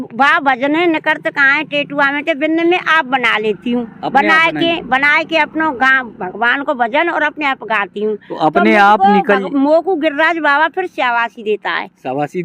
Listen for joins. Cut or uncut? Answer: uncut